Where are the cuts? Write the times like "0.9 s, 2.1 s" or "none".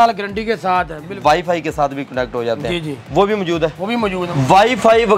1.1 s, 4.3 s